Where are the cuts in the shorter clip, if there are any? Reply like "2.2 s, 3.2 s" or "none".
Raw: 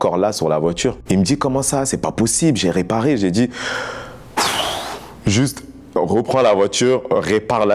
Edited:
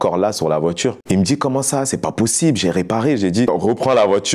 3.5 s